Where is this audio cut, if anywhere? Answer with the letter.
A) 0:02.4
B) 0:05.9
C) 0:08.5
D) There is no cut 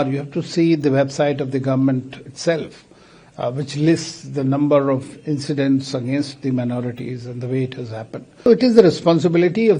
C